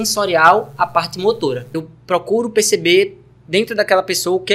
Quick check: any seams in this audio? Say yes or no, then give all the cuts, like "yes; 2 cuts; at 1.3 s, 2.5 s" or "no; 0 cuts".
yes; 1 cut; at 1.7 s